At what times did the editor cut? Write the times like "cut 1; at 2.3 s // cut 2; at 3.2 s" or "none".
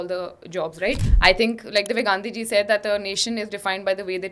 cut 1; at 1.0 s